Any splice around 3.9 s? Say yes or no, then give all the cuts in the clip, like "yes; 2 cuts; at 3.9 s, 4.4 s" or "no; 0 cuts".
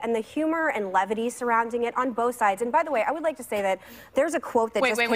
no; 0 cuts